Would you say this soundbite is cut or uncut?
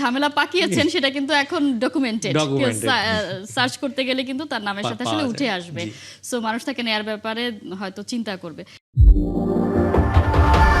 uncut